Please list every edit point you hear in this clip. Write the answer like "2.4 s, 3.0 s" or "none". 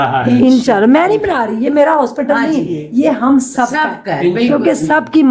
none